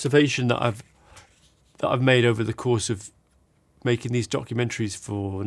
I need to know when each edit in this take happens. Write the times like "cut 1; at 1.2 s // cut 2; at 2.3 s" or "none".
none